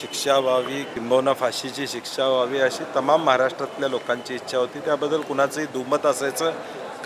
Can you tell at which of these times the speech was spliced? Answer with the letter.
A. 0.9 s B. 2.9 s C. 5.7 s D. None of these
A